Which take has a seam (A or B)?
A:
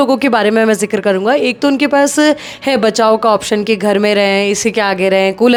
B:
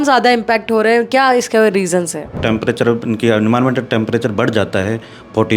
B